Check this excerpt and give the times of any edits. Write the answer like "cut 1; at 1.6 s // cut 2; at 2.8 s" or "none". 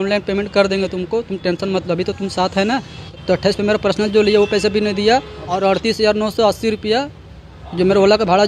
cut 1; at 3.0 s // cut 2; at 5.6 s